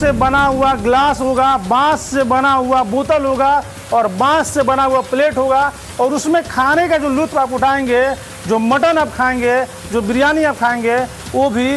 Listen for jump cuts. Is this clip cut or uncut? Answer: uncut